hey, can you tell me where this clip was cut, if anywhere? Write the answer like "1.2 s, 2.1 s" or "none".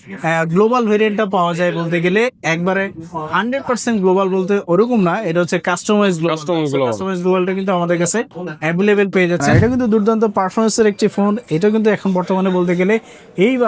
9.5 s